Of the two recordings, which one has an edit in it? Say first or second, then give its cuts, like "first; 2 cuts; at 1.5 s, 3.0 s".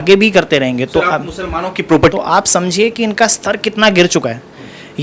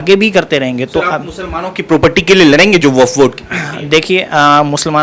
first; 1 cut; at 2.1 s